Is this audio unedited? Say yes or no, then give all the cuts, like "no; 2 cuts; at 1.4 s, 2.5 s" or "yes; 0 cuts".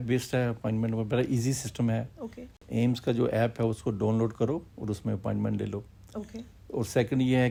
yes; 0 cuts